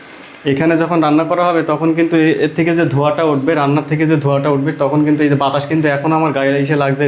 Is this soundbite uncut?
yes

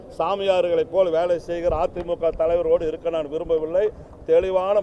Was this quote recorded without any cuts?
yes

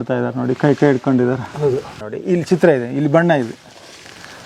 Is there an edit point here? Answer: yes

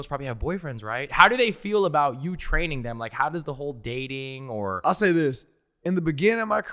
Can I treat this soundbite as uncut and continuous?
no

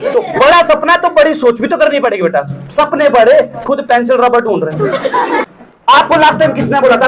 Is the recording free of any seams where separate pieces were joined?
no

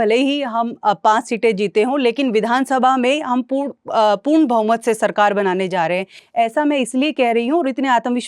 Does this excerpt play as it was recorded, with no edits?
yes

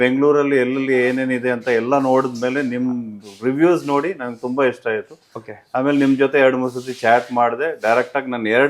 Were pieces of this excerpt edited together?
no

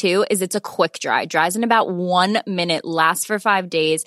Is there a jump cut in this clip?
no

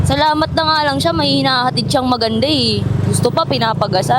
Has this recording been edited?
no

